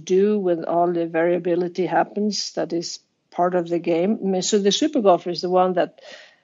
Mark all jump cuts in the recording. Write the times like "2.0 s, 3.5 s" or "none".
none